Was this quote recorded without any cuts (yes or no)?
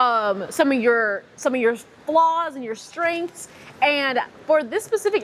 yes